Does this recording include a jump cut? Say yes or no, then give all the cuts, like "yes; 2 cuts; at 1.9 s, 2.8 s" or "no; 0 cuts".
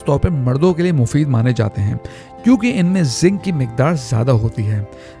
no; 0 cuts